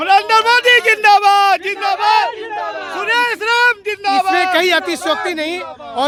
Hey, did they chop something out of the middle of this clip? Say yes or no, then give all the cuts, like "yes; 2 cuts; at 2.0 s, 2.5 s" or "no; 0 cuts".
no; 0 cuts